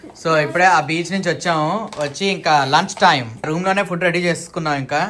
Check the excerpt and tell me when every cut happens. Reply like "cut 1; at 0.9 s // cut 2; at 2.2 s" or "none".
cut 1; at 3.5 s